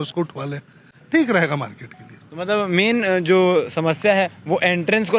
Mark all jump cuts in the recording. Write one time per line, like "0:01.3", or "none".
none